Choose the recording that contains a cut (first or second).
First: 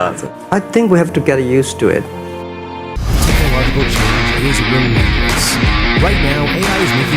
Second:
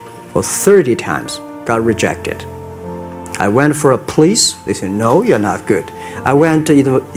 first